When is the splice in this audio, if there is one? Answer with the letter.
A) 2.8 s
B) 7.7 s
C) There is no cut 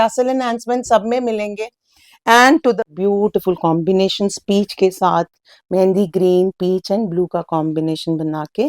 A